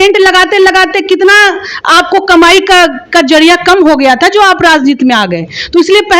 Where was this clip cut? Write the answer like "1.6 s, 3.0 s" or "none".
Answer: none